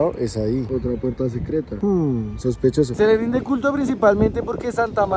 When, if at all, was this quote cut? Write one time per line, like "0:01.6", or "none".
0:02.9